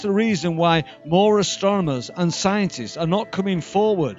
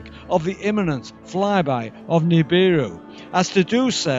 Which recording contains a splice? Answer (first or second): second